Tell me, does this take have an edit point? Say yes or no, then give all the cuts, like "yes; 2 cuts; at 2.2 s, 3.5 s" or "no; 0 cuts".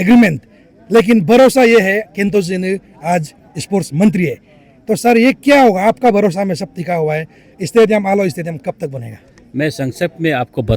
no; 0 cuts